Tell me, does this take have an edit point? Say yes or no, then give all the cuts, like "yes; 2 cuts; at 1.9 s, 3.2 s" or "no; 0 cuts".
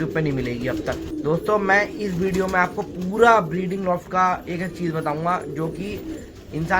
yes; 1 cut; at 1.1 s